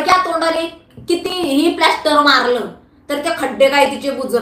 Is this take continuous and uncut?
yes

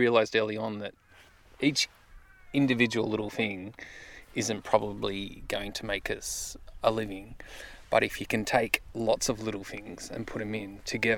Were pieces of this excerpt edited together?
no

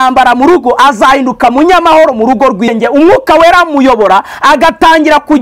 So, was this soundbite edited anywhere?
yes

